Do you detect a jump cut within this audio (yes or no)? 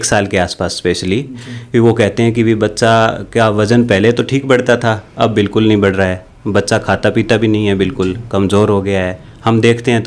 no